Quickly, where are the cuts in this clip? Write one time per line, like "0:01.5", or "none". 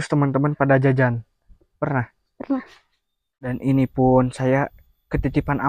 0:03.5